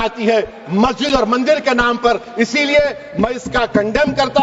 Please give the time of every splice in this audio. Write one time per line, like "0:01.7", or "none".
none